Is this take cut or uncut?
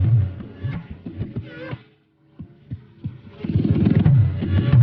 uncut